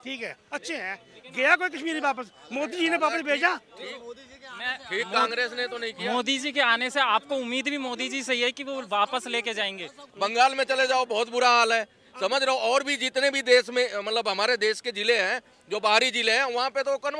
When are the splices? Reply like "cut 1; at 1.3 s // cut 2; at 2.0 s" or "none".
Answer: cut 1; at 10.0 s